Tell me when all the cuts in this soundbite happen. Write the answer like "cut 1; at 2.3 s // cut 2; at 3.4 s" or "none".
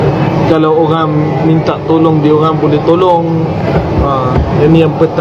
none